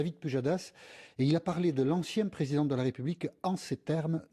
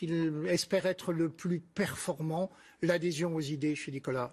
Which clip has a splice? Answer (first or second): second